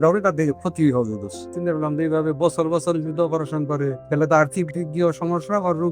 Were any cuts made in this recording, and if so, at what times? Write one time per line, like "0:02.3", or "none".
0:01.5
0:04.0